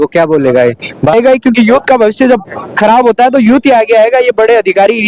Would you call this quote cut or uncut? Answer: cut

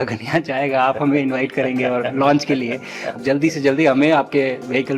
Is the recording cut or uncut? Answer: cut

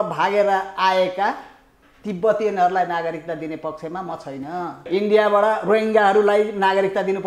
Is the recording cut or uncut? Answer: cut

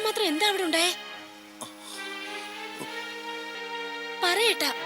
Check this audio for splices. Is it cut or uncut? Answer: cut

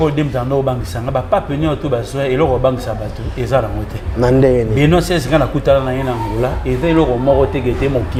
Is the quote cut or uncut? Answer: uncut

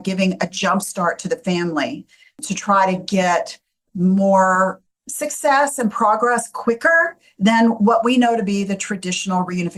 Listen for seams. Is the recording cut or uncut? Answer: uncut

